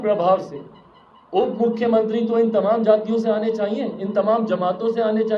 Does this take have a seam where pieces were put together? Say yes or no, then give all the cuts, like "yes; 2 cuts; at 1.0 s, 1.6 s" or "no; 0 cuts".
no; 0 cuts